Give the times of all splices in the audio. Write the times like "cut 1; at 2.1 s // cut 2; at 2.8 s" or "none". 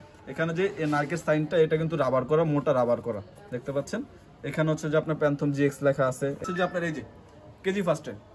cut 1; at 6.4 s